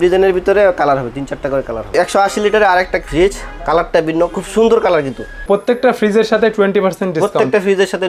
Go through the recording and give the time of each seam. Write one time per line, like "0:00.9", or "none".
0:01.9
0:03.0
0:05.3